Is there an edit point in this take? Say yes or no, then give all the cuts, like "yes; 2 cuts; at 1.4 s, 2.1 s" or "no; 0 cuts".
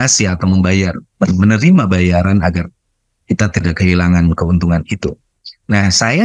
no; 0 cuts